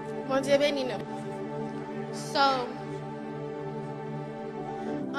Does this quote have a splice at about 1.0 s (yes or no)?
yes